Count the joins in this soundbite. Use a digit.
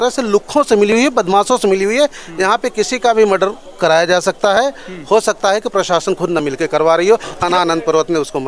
1